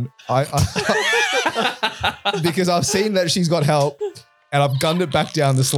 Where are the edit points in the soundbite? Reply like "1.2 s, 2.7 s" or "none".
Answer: none